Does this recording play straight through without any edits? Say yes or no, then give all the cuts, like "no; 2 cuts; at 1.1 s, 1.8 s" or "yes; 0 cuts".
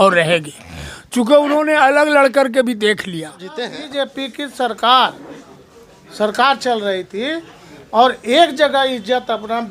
no; 1 cut; at 3.8 s